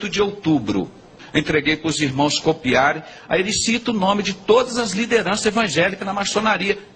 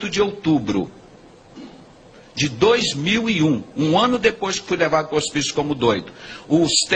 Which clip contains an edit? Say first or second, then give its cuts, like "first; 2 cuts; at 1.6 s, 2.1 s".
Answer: first; 1 cut; at 1.2 s